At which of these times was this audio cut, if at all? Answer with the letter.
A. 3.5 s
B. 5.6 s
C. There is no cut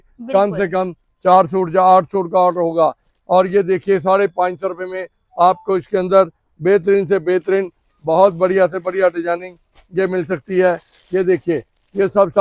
C